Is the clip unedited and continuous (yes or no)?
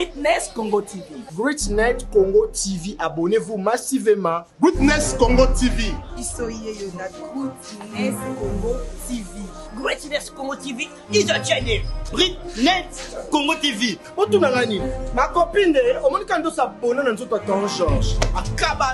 yes